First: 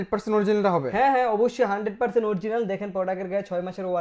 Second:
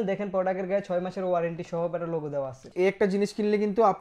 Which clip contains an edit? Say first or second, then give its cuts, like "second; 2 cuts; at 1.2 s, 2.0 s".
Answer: second; 1 cut; at 2.7 s